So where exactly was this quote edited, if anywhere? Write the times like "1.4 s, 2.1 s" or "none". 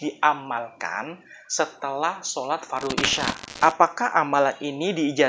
3.6 s